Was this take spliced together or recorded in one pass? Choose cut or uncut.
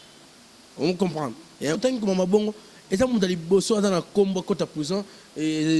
cut